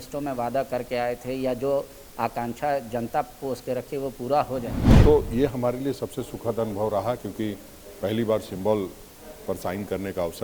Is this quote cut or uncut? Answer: cut